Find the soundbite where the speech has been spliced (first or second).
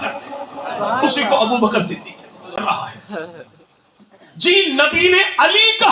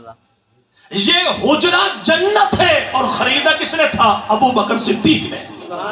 first